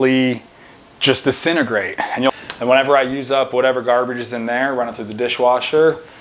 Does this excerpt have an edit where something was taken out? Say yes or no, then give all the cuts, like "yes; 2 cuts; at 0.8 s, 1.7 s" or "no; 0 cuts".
yes; 1 cut; at 2.3 s